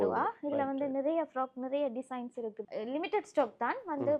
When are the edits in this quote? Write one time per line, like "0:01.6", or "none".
0:02.7